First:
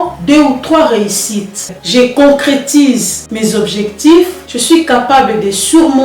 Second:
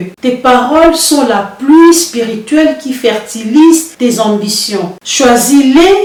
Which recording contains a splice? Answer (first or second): first